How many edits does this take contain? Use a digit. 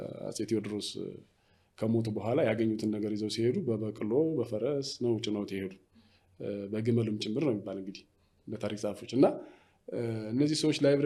0